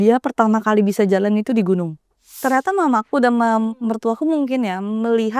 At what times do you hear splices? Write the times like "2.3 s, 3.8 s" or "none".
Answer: 2.3 s